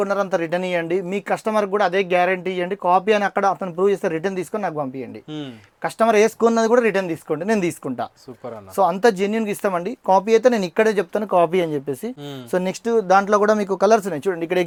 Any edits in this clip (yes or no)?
no